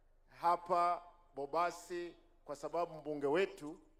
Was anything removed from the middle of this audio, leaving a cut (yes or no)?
no